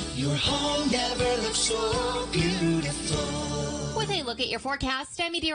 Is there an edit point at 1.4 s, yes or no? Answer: no